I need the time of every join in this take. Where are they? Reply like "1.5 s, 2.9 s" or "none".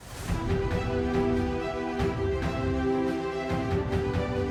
none